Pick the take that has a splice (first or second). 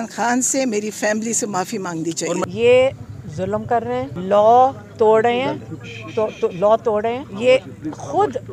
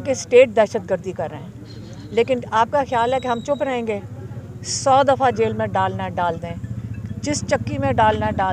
first